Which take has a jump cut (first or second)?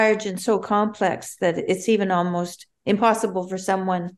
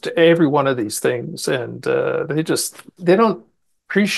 second